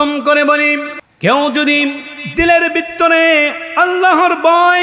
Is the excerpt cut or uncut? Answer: cut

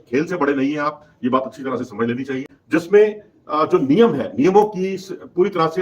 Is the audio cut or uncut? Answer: cut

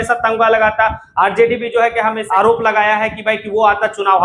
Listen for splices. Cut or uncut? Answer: cut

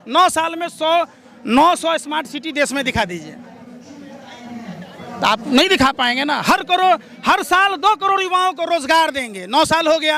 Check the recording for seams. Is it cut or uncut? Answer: uncut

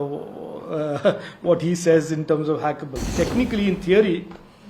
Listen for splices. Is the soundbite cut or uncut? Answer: cut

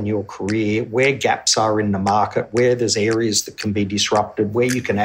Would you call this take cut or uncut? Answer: uncut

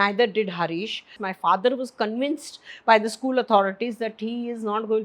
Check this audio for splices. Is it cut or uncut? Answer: cut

